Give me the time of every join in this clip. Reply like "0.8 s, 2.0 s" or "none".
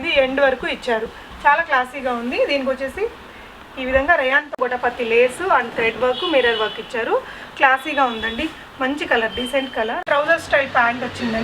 4.5 s, 10.0 s